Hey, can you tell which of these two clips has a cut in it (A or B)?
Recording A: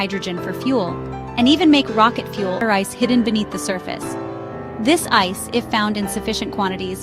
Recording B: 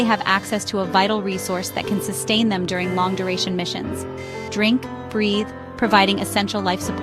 A